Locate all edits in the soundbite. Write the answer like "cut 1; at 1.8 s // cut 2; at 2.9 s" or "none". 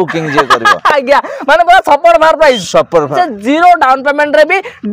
cut 1; at 3.1 s